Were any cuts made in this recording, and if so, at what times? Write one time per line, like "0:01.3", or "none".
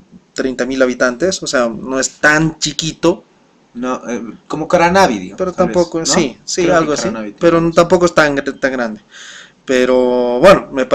none